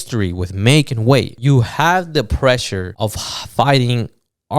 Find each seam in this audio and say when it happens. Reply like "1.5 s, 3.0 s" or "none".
1.3 s, 2.8 s